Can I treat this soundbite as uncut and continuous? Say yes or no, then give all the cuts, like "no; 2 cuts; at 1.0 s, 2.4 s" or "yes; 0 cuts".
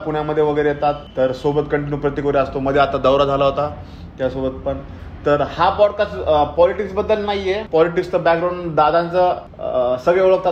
yes; 0 cuts